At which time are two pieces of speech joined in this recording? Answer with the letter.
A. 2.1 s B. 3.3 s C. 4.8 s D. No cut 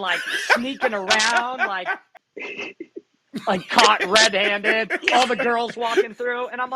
A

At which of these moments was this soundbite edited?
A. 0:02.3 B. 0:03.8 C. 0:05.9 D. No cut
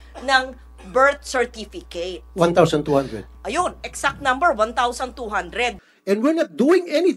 C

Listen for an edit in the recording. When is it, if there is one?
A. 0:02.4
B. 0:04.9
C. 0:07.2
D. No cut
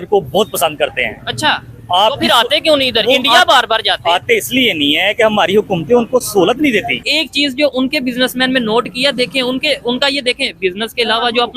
C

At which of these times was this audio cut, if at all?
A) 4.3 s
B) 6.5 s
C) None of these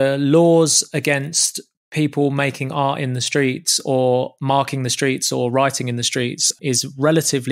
B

